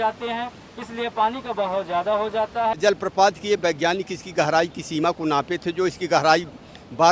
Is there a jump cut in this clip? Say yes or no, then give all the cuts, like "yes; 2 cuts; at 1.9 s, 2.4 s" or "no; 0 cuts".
yes; 1 cut; at 2.8 s